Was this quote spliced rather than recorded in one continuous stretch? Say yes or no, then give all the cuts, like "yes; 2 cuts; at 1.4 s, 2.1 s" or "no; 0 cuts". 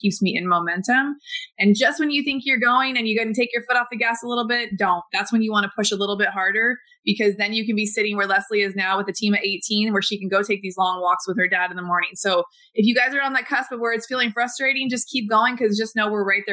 no; 0 cuts